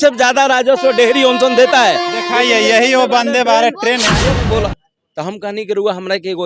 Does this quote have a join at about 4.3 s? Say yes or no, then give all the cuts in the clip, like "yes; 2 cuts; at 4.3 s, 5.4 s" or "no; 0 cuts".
yes; 1 cut; at 4.3 s